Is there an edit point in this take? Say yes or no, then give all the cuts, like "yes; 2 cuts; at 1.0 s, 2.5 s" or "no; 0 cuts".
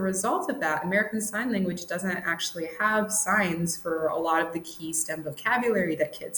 no; 0 cuts